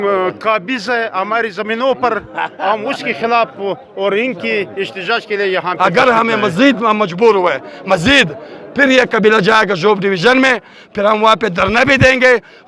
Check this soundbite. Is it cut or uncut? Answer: cut